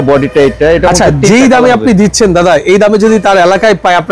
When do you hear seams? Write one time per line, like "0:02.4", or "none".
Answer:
none

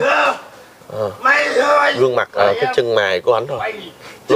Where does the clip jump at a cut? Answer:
0:02.4

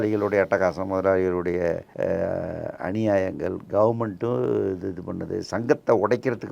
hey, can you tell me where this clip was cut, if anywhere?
0:01.9

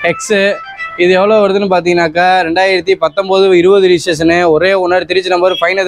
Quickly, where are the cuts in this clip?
none

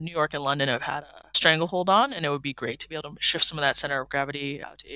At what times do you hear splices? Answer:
none

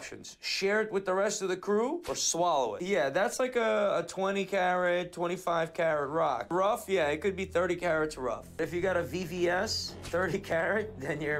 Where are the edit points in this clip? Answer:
0:02.8
0:08.5

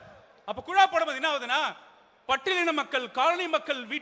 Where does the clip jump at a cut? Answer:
none

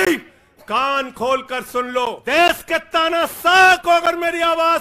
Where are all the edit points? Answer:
0:02.2

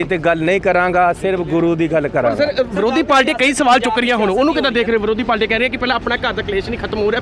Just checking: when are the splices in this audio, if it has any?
none

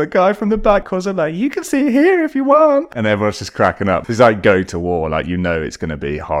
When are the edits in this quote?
0:00.9
0:02.9
0:04.0

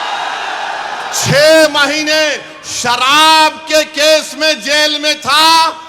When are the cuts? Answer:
none

